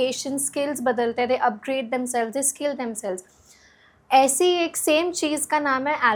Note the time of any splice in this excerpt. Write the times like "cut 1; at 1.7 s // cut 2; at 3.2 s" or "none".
none